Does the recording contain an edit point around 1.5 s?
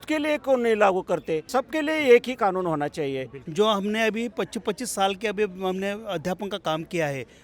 yes; 2 cuts; at 1.5 s, 3.4 s

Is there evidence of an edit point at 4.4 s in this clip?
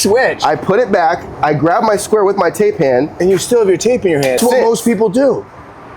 yes; 1 cut; at 4.4 s

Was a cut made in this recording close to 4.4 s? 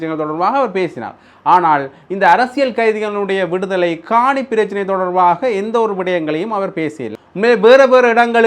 no; 1 cut; at 7.0 s

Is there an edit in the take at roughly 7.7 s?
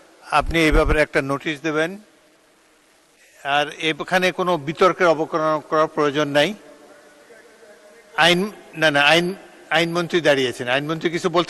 no; 0 cuts

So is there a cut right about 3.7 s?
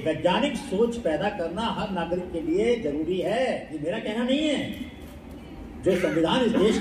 yes; 1 cut; at 3.7 s

